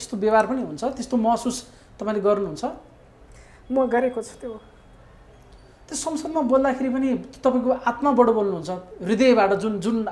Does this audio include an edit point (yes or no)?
no